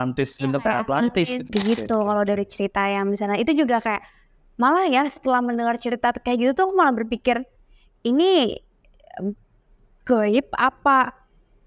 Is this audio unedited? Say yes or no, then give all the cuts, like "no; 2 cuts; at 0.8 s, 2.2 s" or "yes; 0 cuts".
no; 1 cut; at 1.4 s